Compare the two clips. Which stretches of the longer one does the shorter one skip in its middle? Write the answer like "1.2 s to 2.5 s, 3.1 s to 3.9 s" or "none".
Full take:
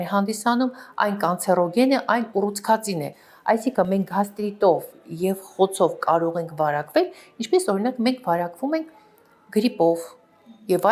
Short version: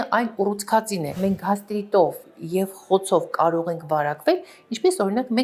3.2 s to 3.9 s